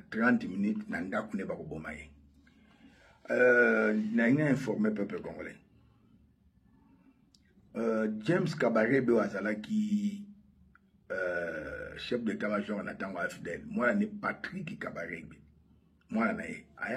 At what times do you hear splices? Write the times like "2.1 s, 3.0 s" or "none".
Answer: none